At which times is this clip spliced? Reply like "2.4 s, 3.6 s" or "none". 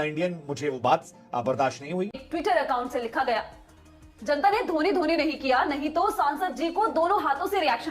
2.2 s